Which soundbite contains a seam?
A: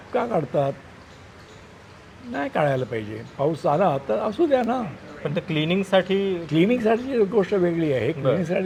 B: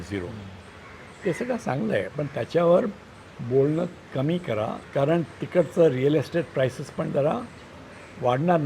B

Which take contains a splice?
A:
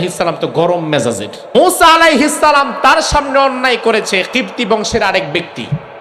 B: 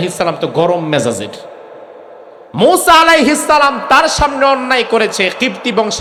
A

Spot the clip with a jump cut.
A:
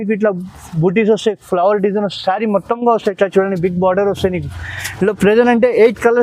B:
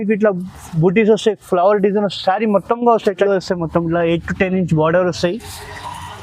B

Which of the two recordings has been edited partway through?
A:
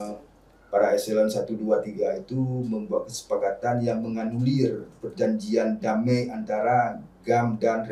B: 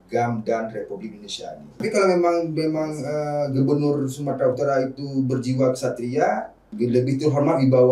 B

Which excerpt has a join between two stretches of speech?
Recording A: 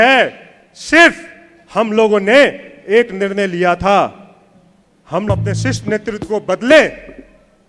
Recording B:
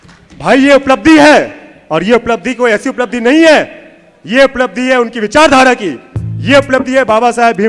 A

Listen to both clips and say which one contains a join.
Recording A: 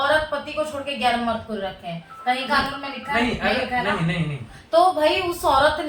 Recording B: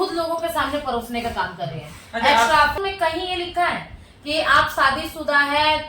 B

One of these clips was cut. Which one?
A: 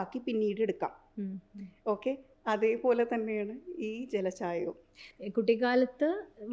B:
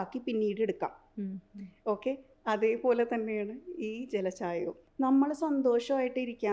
B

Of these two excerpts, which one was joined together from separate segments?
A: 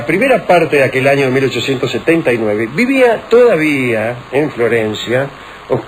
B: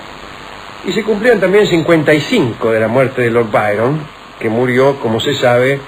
A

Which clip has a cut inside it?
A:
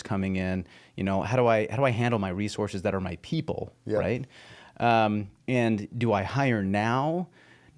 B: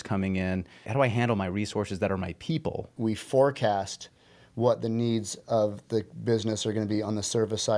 B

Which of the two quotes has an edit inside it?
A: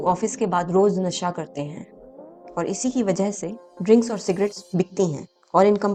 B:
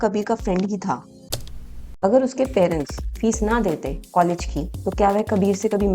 B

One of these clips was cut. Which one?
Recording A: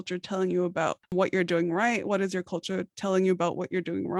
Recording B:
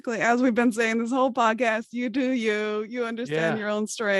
A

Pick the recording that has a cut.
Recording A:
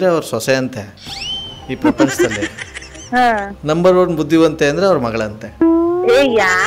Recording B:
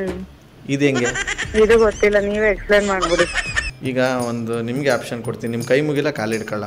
B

